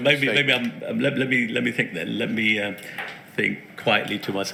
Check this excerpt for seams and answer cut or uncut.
uncut